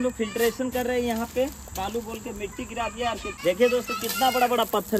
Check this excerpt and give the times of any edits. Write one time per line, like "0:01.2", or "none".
0:01.8
0:03.3